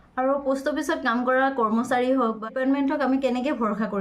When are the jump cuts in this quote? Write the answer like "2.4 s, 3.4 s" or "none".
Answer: 2.5 s